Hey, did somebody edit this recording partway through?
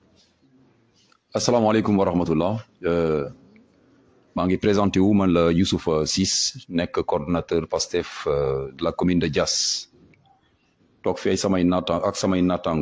no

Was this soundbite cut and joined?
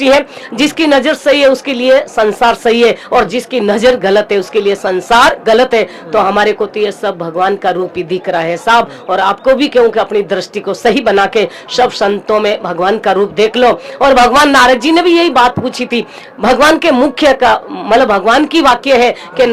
no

